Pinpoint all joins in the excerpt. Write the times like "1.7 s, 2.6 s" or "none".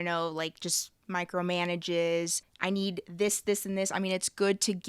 2.4 s